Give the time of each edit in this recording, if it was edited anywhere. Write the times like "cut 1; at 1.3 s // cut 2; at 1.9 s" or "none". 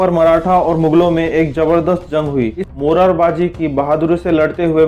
cut 1; at 2.6 s

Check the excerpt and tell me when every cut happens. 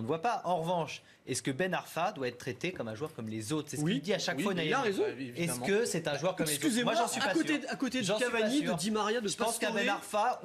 none

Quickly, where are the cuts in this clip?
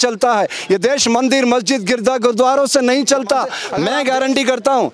cut 1; at 3.7 s

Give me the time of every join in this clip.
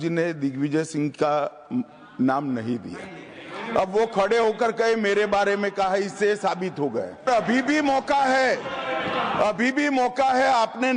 cut 1; at 7.3 s

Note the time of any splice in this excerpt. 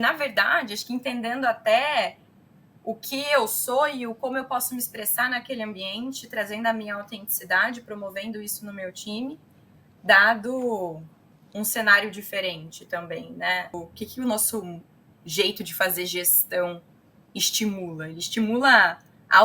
cut 1; at 13.8 s

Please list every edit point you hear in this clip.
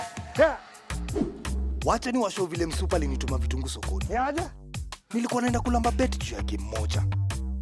none

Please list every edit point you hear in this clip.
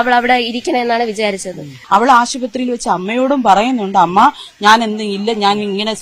cut 1; at 1.7 s

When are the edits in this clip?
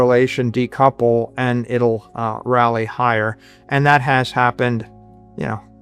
none

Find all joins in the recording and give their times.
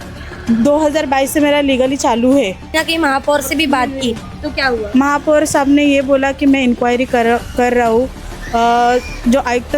cut 1; at 2.8 s

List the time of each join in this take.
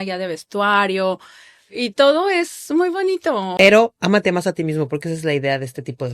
cut 1; at 3.5 s

